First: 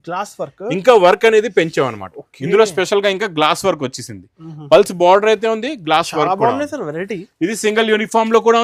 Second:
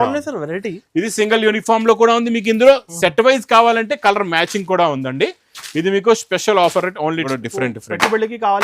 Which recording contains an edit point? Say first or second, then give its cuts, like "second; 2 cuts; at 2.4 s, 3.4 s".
second; 1 cut; at 7.2 s